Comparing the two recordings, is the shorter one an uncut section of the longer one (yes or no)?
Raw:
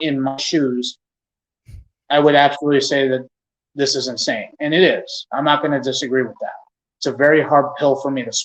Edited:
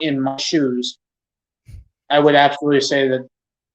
yes